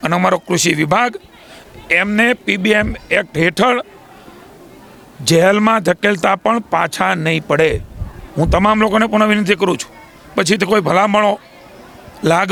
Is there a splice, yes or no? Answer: no